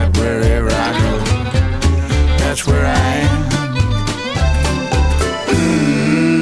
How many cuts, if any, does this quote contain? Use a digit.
0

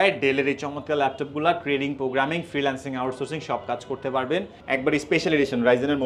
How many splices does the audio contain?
1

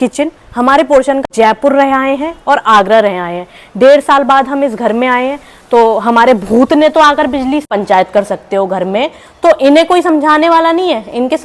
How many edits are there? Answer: 2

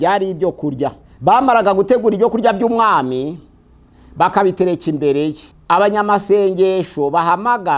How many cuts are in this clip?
2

